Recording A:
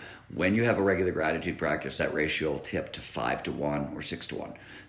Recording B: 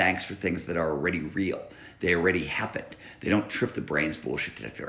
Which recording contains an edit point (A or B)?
A